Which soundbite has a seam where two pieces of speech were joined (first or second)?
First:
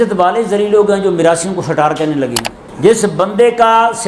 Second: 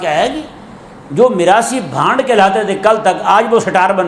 first